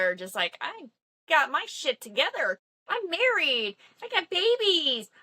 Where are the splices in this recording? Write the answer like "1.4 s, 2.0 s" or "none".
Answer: 2.6 s